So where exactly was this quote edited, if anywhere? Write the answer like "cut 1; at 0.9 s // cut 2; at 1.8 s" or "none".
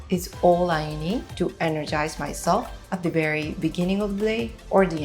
cut 1; at 1.3 s // cut 2; at 2.8 s